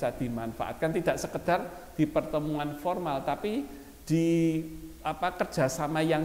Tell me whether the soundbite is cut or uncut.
uncut